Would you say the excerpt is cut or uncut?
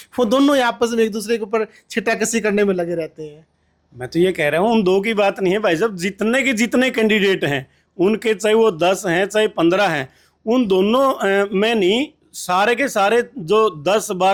uncut